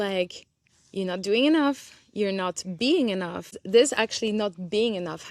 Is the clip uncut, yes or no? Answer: no